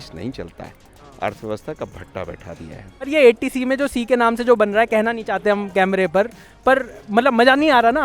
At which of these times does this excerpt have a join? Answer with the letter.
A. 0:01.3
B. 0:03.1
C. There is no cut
B